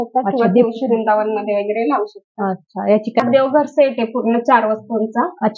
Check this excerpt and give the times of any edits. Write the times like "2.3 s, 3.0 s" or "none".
3.2 s